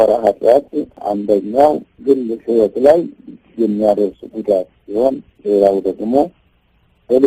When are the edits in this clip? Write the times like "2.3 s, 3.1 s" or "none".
1.0 s, 1.9 s